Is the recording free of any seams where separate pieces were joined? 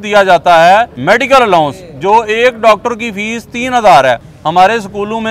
no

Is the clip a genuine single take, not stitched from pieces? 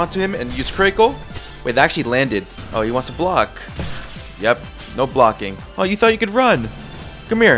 no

